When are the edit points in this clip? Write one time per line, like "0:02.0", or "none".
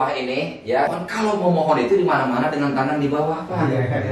0:00.9